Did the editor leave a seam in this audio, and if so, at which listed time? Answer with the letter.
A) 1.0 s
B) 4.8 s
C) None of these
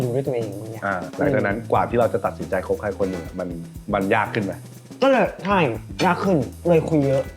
A